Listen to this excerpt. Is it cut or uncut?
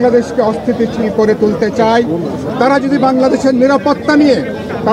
uncut